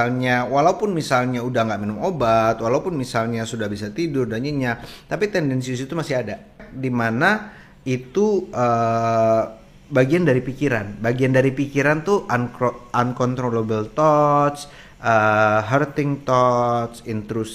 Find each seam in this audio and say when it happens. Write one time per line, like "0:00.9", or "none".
0:06.7